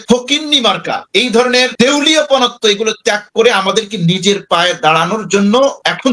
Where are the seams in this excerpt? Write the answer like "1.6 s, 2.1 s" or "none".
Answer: none